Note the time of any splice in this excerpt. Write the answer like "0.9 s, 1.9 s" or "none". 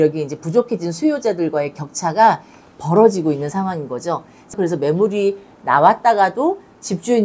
4.4 s